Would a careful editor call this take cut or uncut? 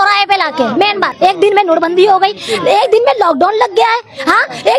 cut